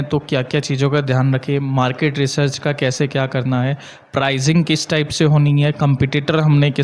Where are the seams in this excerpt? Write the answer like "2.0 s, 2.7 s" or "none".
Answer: none